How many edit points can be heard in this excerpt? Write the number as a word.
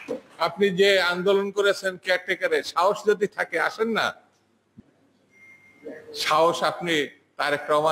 one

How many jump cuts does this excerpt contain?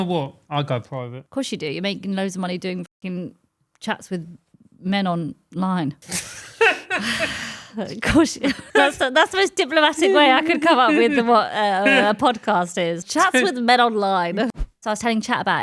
four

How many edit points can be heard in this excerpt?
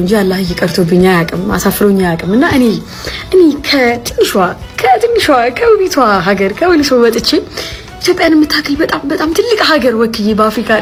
zero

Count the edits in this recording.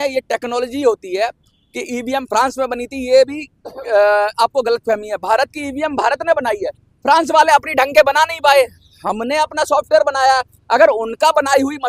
zero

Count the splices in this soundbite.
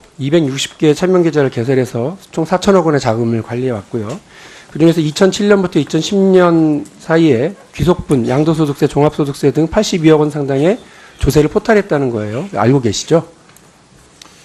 zero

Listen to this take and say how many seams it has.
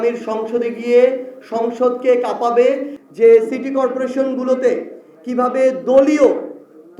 one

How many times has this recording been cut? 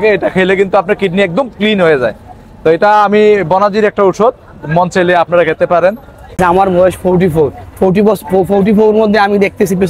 one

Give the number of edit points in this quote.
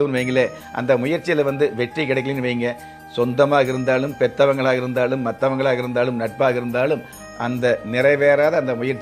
zero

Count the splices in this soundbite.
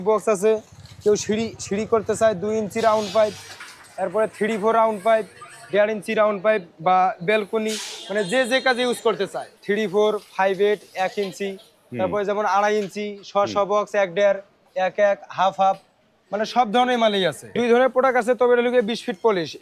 two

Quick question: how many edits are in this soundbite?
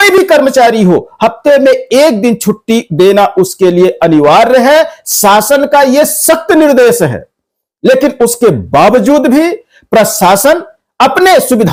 zero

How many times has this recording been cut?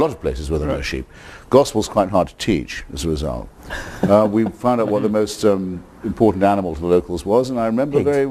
one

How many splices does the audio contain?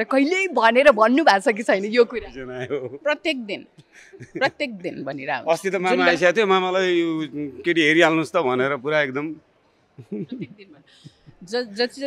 zero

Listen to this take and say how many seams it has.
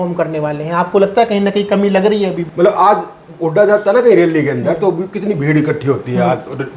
one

